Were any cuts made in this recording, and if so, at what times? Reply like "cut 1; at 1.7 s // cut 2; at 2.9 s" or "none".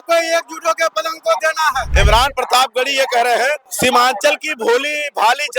cut 1; at 1.9 s // cut 2; at 3.7 s